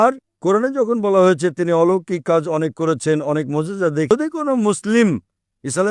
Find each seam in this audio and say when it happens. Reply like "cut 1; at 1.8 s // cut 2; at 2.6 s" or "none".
cut 1; at 4.1 s